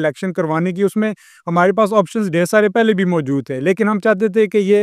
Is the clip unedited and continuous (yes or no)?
yes